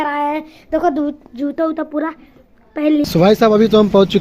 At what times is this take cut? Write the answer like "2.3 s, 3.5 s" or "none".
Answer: 3.0 s